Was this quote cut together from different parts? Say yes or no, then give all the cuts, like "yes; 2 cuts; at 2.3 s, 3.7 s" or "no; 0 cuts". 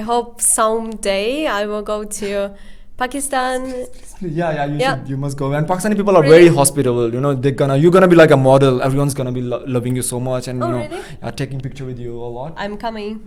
no; 0 cuts